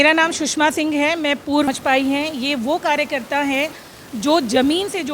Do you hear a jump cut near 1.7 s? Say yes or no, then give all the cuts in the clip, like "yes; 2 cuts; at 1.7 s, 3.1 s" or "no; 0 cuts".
yes; 1 cut; at 1.7 s